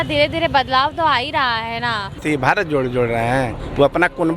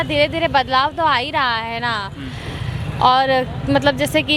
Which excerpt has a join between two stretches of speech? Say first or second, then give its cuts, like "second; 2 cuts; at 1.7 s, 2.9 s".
first; 1 cut; at 2.2 s